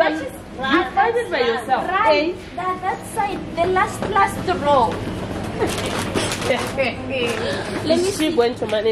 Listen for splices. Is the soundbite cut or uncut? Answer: uncut